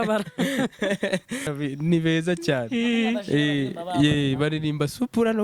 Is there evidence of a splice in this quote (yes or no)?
yes